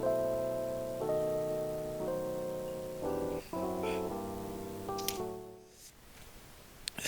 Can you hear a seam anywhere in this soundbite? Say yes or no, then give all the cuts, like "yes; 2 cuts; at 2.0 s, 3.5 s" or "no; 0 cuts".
yes; 1 cut; at 5.5 s